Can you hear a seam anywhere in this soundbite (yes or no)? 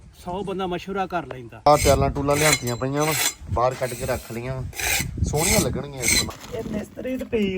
yes